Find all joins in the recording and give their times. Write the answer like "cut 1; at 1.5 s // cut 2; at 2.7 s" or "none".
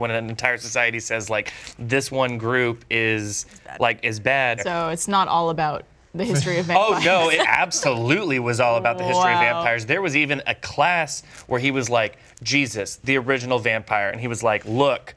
cut 1; at 4.6 s // cut 2; at 7.3 s